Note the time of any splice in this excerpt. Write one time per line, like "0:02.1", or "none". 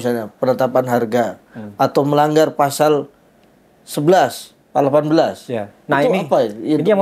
none